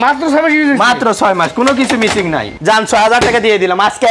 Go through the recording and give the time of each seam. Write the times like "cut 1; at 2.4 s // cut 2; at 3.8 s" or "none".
cut 1; at 2.5 s